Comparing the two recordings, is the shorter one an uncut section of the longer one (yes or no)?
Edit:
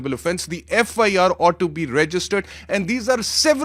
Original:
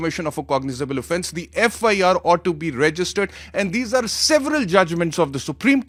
yes